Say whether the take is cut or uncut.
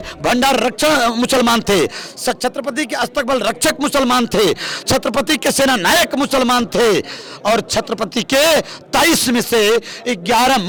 uncut